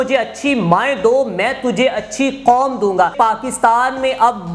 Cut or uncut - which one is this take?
cut